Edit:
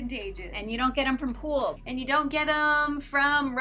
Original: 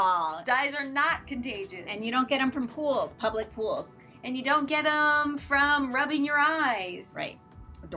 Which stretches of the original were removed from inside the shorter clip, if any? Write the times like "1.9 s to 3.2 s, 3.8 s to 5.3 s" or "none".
3.1 s to 4.2 s